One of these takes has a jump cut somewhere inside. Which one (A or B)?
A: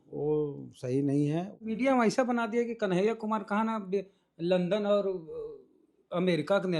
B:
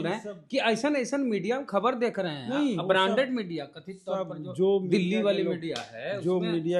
A